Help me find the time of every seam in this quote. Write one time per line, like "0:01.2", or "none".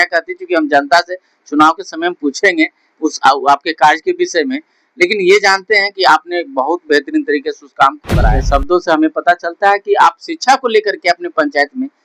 0:08.2